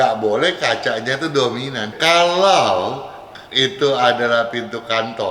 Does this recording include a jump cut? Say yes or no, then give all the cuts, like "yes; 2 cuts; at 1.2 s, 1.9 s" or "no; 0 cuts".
yes; 1 cut; at 1.9 s